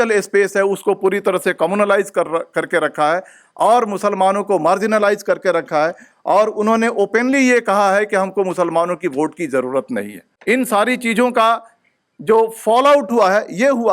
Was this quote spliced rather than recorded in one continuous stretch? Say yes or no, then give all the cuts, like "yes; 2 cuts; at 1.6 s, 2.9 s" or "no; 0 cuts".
yes; 1 cut; at 10.3 s